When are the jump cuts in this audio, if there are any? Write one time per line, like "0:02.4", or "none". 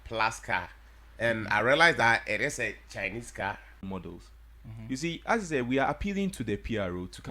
0:03.8